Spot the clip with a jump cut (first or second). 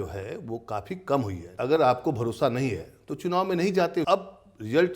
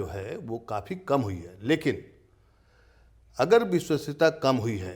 first